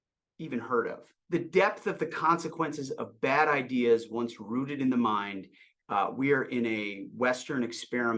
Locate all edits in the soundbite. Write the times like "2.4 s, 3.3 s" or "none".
1.1 s